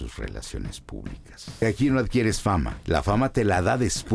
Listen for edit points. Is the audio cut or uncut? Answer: cut